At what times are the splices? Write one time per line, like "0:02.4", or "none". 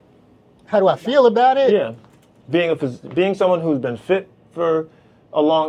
none